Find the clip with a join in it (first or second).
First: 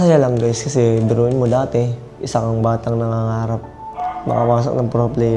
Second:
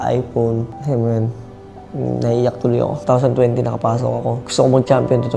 second